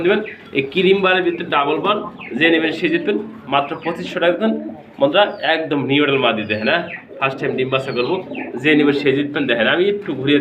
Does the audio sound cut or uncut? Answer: uncut